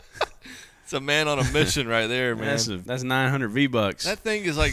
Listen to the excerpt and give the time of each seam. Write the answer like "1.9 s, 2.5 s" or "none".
2.8 s